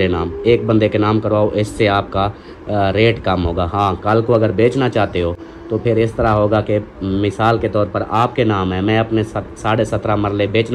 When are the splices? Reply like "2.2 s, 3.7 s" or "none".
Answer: none